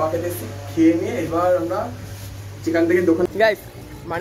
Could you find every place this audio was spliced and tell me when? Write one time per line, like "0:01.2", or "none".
0:03.3

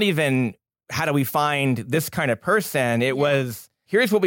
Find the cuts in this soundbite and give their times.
0:01.0

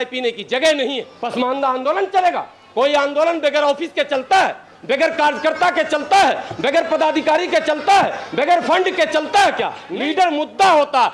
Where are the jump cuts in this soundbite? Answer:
0:01.1
0:09.8

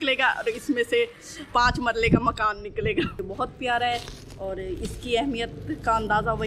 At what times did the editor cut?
0:03.2

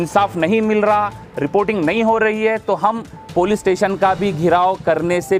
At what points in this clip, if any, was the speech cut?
none

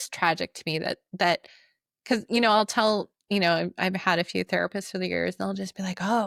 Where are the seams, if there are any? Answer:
none

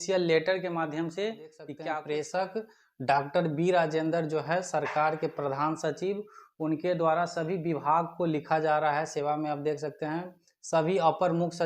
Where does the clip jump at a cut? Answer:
0:01.7

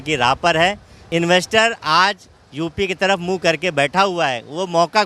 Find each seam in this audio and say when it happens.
0:01.0

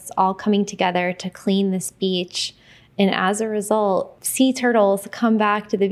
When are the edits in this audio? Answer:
0:04.2

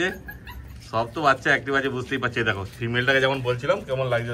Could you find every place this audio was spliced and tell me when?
none

